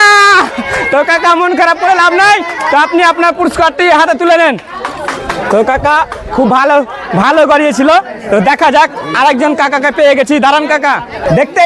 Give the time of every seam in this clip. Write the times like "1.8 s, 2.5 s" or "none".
none

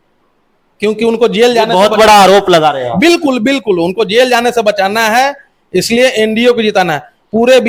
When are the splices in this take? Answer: none

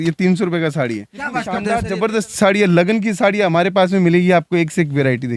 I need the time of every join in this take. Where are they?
1.5 s

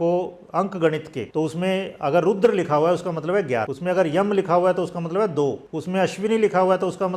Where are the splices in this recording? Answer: 1.2 s, 3.7 s, 5.7 s

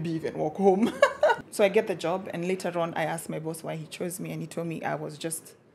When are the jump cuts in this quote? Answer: 1.4 s

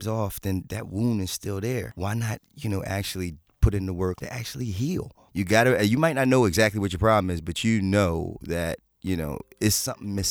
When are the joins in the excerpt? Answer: 1.9 s, 4.8 s

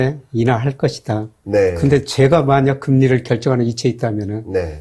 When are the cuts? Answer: none

